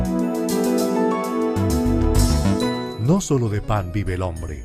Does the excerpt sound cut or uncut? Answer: cut